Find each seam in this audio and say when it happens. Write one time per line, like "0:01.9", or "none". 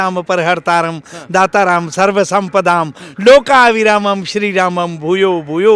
none